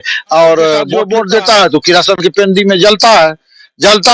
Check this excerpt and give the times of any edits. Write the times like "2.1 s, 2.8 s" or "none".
1.0 s

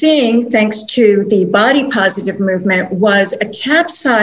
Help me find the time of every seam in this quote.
none

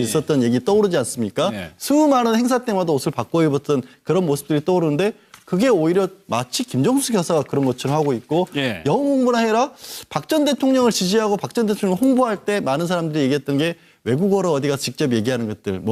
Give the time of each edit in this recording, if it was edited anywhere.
none

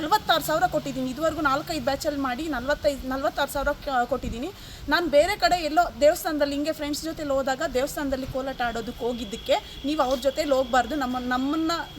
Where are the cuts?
none

